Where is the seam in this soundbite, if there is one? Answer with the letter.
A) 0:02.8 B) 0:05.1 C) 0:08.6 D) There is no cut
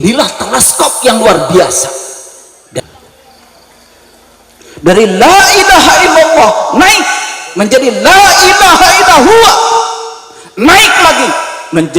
A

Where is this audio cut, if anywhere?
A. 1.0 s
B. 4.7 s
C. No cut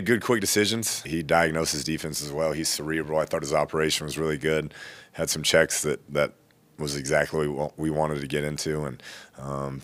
A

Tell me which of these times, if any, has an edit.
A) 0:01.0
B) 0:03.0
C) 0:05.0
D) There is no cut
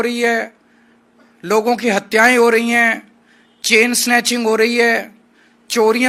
D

